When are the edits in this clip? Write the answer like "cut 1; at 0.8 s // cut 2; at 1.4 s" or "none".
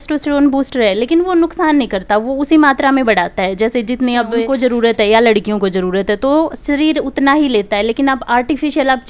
cut 1; at 4.4 s